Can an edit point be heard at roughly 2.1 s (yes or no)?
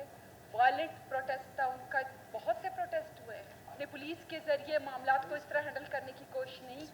no